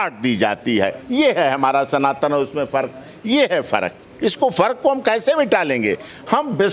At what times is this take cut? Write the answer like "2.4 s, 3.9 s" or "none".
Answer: none

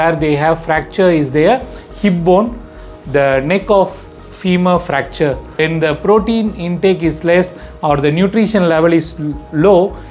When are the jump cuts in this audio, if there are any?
5.5 s

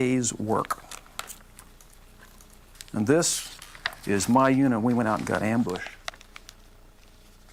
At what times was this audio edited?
none

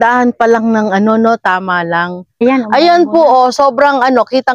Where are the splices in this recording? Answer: 2.4 s

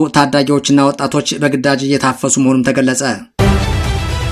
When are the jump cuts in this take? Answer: 3.3 s

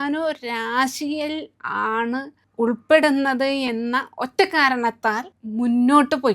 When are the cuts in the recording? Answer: 2.4 s, 5.3 s

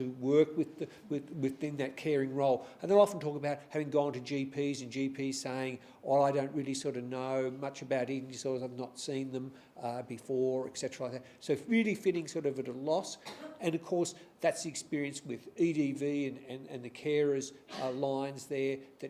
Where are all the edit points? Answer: none

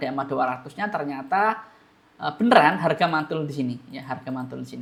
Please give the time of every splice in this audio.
none

